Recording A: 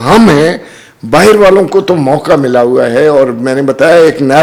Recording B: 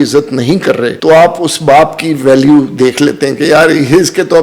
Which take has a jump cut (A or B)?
B